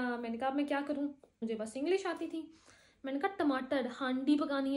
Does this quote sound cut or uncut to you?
cut